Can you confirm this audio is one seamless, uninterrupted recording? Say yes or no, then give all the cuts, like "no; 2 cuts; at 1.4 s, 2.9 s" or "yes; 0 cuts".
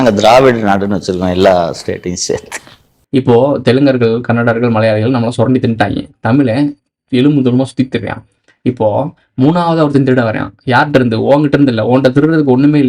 no; 1 cut; at 2.9 s